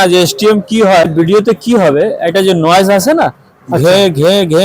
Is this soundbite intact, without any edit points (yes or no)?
no